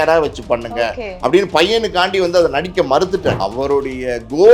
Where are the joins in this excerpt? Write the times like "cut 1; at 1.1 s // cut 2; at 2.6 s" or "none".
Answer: cut 1; at 3.4 s